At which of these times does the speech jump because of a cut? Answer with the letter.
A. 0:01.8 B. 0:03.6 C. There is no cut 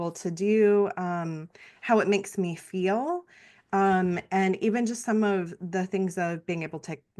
C